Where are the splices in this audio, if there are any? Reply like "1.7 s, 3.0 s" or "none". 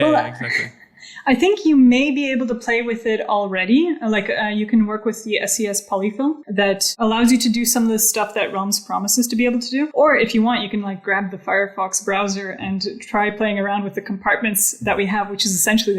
6.4 s, 9.9 s